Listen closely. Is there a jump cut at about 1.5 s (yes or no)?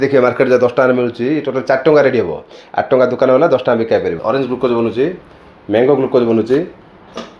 no